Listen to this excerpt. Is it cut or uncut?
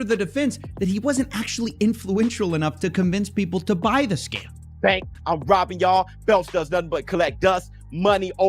cut